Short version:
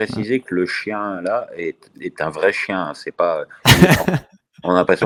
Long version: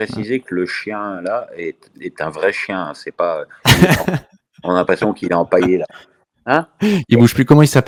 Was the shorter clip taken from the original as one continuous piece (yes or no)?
yes